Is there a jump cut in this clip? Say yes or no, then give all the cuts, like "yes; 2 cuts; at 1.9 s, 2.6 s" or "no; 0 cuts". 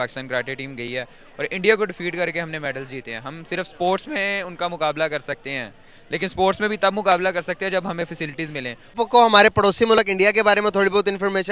yes; 1 cut; at 9.0 s